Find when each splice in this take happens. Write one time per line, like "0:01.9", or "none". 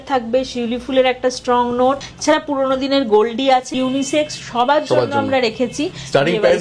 0:02.1
0:03.7

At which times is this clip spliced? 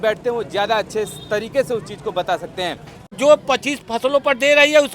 0:03.2

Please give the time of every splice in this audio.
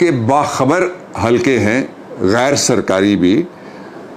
none

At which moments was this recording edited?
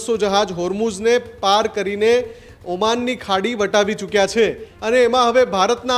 0:04.7

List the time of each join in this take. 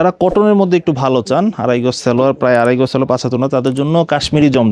none

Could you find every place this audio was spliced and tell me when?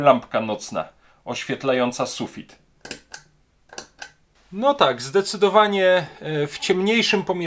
0:04.3

